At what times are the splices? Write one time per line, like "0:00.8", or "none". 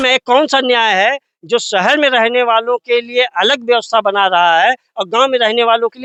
none